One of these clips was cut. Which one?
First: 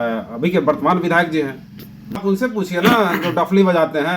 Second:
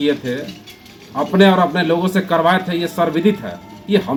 first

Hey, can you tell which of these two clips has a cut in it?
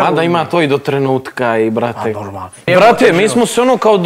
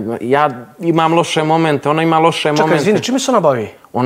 first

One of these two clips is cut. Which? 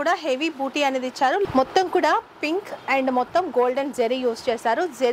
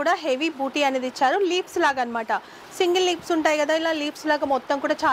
first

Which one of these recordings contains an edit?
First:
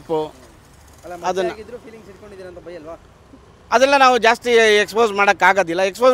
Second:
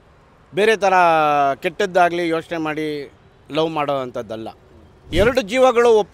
second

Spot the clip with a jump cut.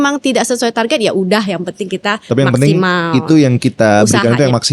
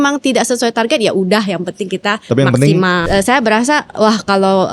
second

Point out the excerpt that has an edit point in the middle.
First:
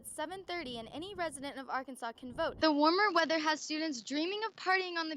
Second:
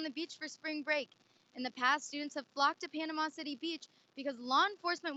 first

